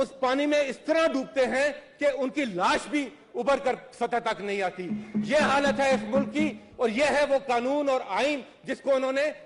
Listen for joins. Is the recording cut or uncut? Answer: uncut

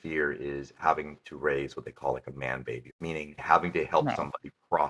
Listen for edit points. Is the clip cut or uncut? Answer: cut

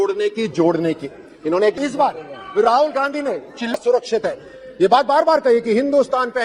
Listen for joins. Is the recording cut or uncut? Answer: cut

